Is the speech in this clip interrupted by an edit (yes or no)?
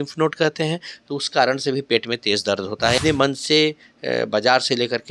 yes